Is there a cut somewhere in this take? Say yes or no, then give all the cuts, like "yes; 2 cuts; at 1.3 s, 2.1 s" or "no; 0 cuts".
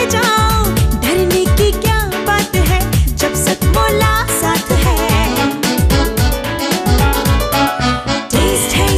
no; 0 cuts